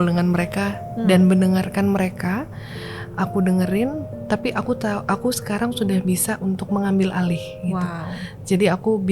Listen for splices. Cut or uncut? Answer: uncut